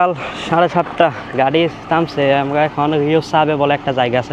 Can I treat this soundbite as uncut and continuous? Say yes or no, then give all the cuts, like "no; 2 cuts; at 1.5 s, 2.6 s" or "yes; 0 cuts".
yes; 0 cuts